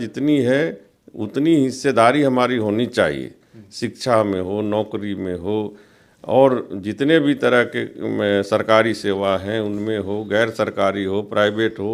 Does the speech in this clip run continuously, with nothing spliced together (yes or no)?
yes